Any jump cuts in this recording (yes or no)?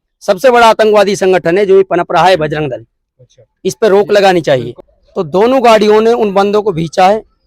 yes